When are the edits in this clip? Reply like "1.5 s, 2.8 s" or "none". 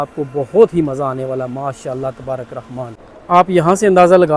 3.1 s